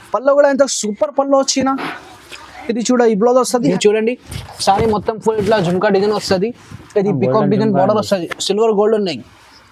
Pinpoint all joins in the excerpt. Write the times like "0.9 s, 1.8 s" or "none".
3.7 s